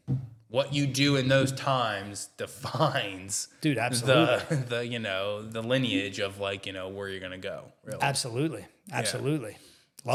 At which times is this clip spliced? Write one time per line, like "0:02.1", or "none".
none